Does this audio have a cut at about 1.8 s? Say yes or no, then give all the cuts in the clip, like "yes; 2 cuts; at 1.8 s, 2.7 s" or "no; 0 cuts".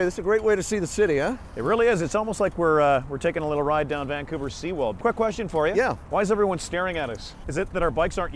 no; 1 cut; at 5.0 s